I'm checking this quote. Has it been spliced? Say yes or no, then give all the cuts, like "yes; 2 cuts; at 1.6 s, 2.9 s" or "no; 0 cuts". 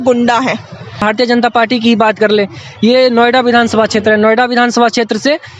yes; 1 cut; at 1.0 s